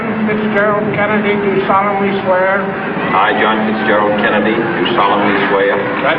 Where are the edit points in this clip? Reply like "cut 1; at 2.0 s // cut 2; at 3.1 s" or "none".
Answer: none